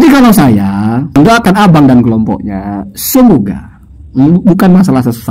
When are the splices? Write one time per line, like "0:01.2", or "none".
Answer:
0:01.2